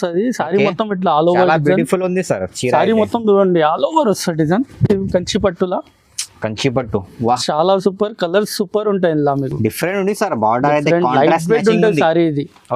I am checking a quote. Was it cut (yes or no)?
no